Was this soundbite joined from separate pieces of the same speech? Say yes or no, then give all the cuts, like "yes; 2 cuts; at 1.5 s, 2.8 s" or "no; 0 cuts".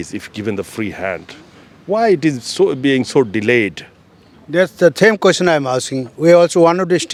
no; 0 cuts